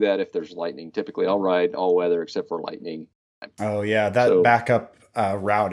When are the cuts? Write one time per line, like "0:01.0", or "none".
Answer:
0:03.2